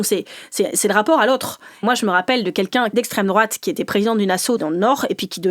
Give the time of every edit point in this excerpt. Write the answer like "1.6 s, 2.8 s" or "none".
1.8 s, 2.9 s, 4.6 s